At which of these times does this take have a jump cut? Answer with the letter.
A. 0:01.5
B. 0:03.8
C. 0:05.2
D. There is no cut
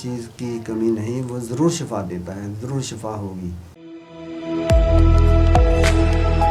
B